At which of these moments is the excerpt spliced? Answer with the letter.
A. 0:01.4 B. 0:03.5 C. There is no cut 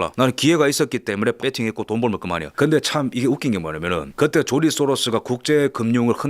A